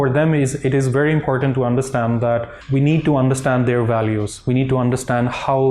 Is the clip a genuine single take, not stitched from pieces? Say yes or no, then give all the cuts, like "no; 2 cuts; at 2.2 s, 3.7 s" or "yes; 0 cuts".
no; 1 cut; at 2.6 s